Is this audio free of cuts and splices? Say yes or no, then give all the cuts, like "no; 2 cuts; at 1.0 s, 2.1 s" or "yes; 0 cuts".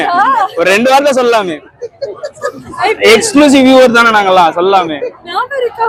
yes; 0 cuts